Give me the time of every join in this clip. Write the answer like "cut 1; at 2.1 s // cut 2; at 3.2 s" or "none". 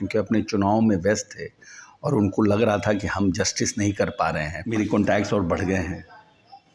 cut 1; at 4.7 s